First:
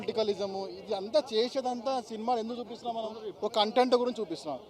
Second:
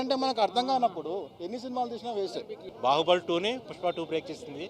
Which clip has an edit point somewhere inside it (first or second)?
second